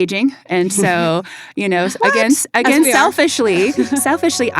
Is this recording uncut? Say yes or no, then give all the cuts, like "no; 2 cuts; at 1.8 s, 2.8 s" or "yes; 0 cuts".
yes; 0 cuts